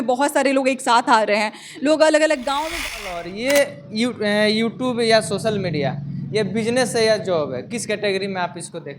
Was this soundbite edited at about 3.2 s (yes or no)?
yes